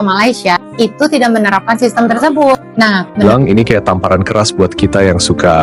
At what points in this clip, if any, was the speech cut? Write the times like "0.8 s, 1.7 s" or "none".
3.3 s